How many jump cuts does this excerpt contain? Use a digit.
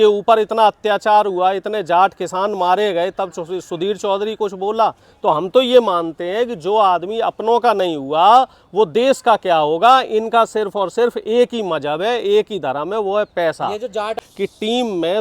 1